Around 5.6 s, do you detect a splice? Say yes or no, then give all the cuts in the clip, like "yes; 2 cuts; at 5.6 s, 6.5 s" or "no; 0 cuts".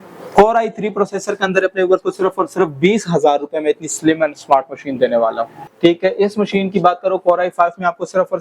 yes; 1 cut; at 5.6 s